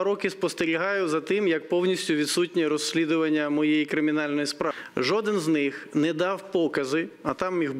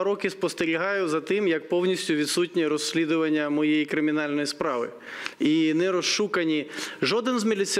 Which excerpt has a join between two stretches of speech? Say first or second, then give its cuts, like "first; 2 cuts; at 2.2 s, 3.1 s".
first; 1 cut; at 4.7 s